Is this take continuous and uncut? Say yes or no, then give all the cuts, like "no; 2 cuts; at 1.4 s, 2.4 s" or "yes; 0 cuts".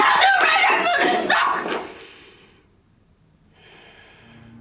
yes; 0 cuts